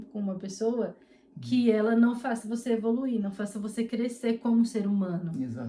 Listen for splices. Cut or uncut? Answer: uncut